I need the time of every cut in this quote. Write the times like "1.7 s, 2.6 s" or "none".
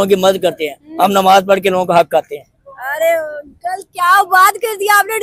none